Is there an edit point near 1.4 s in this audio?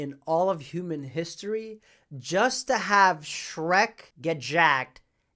no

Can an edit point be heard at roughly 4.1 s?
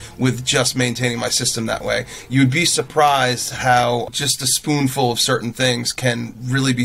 yes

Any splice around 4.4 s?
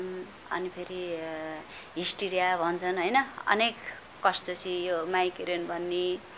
yes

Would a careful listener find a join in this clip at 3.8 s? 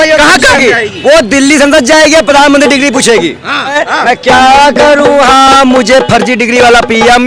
yes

